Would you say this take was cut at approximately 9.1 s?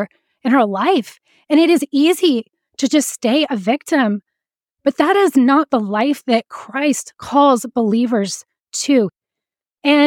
yes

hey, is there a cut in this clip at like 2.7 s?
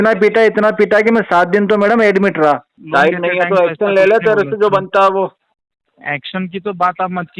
yes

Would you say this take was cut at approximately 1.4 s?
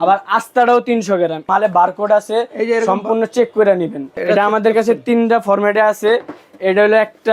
yes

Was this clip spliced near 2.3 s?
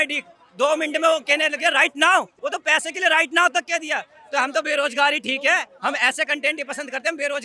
yes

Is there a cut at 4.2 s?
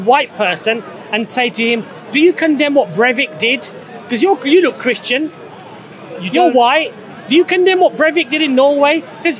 no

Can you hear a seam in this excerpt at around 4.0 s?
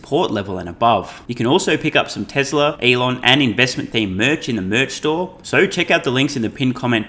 no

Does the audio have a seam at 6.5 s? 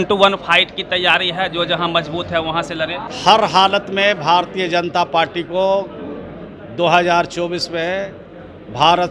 no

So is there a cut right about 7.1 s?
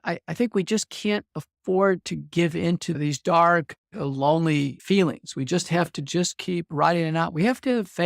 no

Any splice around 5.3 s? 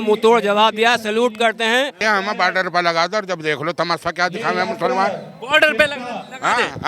no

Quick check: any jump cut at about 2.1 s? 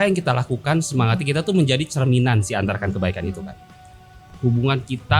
no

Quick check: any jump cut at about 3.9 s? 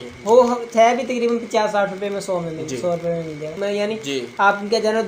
yes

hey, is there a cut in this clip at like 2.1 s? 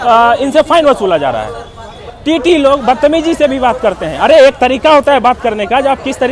yes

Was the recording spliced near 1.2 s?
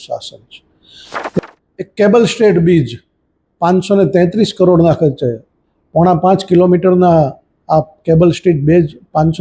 yes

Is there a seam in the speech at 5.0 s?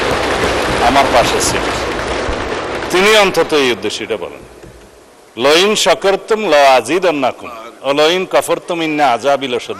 no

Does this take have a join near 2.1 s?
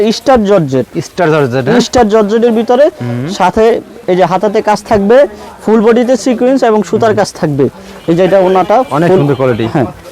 no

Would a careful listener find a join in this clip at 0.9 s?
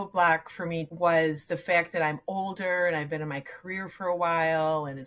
yes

